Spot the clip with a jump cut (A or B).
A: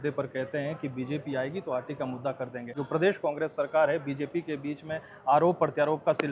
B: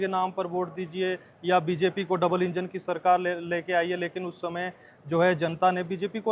A